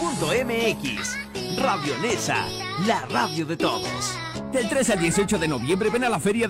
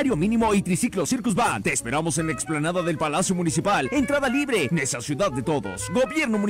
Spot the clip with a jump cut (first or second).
first